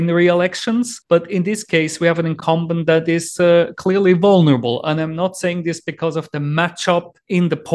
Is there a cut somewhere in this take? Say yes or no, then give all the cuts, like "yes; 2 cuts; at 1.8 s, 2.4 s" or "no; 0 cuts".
no; 0 cuts